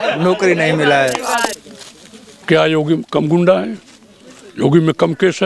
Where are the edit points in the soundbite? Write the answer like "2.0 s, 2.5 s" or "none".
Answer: 1.6 s